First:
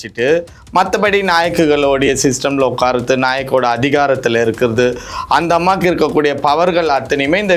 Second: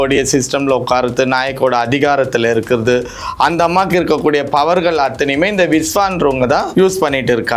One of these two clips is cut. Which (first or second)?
second